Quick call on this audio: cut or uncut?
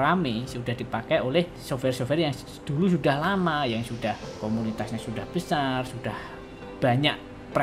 cut